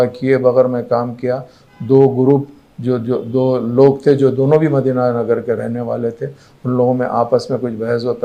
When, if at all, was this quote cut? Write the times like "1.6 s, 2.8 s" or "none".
none